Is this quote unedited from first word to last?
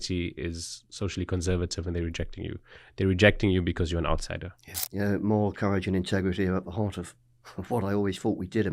no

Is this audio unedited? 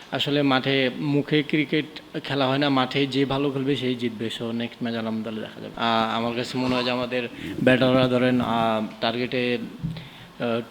no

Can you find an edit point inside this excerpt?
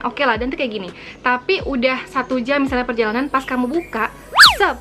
no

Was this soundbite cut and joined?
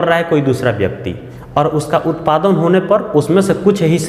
no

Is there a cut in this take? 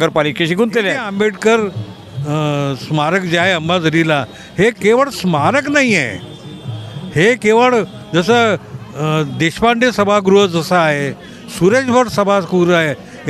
yes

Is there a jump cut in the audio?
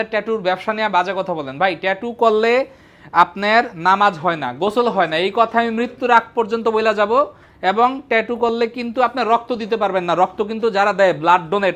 no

